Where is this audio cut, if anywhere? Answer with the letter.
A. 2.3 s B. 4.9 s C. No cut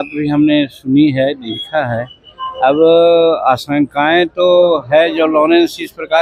C